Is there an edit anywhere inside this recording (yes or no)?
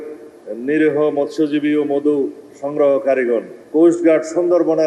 yes